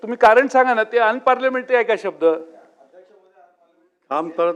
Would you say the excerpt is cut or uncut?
uncut